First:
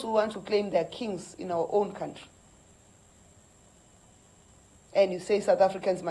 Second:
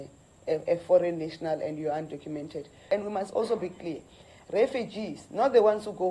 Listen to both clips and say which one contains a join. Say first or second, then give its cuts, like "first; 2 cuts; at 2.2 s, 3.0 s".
second; 1 cut; at 2.8 s